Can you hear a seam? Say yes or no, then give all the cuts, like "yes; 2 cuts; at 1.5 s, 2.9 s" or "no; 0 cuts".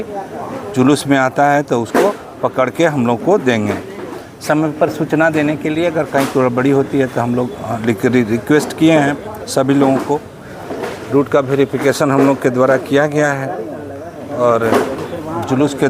no; 0 cuts